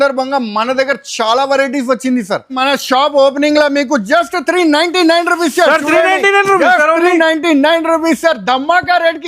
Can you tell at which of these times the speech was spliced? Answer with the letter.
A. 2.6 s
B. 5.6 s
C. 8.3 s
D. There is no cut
A